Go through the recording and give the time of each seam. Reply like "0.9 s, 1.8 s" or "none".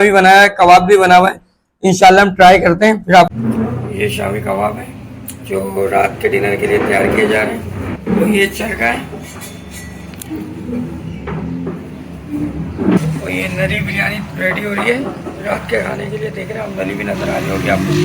3.3 s